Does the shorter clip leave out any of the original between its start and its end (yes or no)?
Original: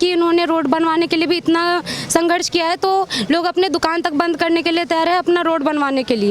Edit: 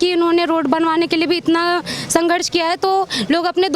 no